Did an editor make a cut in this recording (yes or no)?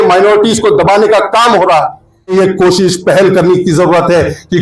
yes